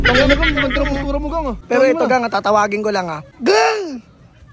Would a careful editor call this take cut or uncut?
cut